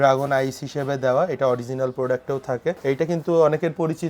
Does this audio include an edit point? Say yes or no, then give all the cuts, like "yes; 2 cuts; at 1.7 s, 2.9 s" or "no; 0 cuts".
yes; 1 cut; at 2.8 s